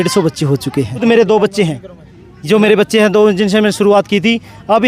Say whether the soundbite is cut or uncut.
cut